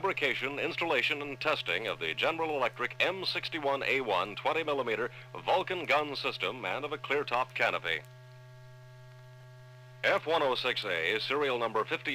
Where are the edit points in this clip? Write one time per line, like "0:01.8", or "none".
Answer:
0:06.4